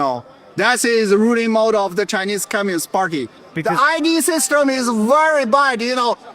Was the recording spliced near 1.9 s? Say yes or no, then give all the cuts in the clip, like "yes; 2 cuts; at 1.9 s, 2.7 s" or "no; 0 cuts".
no; 1 cut; at 3.4 s